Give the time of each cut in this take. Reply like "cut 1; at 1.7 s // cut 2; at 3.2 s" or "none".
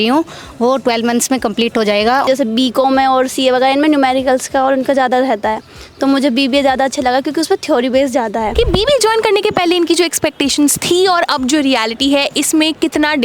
cut 1; at 2.2 s // cut 2; at 8.5 s